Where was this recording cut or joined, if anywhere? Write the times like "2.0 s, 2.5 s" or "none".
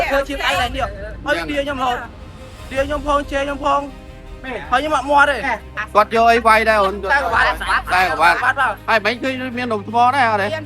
5.7 s